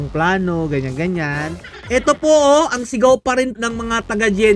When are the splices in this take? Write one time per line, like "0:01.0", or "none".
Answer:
0:01.7
0:03.5